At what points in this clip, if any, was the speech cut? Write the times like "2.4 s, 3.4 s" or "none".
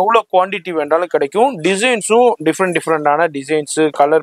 none